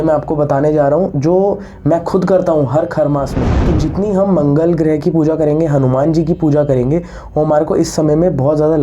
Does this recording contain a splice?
yes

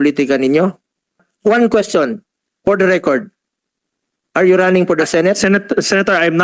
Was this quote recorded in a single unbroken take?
no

